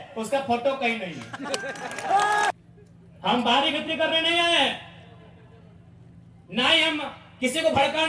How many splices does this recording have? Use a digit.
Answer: 1